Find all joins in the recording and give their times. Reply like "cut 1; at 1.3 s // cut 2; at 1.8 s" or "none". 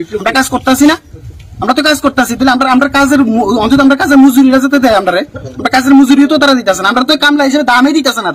none